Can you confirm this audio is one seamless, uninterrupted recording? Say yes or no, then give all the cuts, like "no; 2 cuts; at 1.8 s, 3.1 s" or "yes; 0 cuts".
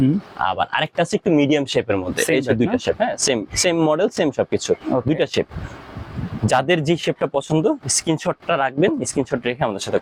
yes; 0 cuts